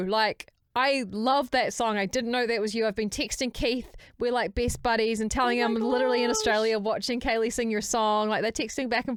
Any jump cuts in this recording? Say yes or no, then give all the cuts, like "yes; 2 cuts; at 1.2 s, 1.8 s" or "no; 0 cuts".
no; 0 cuts